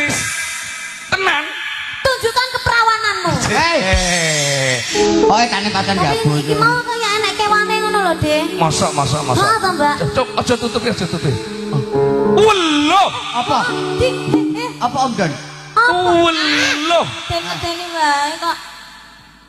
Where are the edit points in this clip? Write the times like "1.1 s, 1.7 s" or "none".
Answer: 4.9 s

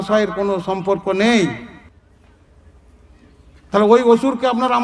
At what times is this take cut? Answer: 1.9 s

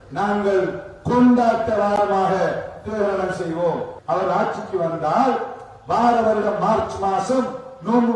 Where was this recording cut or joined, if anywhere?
3.9 s

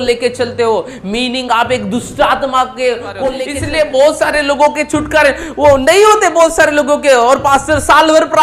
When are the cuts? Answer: 3.5 s

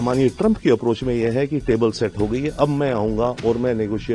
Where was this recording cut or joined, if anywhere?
none

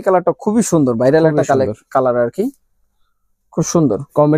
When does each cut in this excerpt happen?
none

